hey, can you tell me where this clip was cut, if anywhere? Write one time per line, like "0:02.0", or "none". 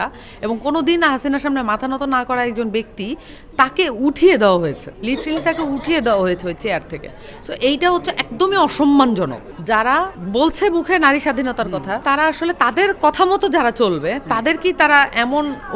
0:04.9
0:09.9
0:12.0